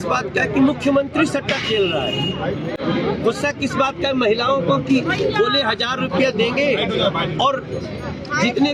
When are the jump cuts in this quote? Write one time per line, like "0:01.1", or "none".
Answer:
none